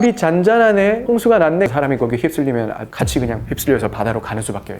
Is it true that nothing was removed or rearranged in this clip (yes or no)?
no